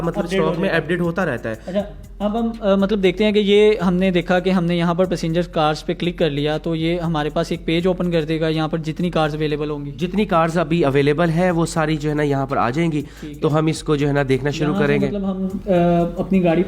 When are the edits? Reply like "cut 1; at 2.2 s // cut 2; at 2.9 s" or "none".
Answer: none